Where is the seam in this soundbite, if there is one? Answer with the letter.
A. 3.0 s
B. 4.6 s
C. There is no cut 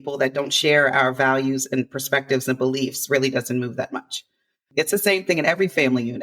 B